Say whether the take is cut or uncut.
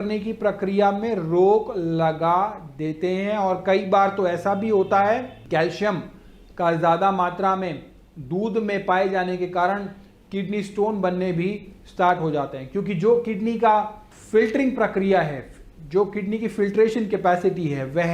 uncut